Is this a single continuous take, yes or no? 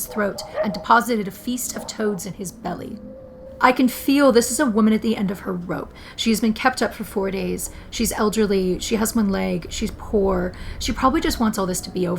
no